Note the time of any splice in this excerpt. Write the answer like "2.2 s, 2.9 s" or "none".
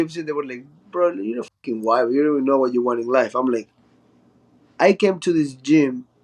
none